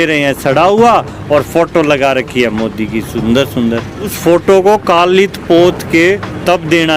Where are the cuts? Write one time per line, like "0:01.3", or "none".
0:04.1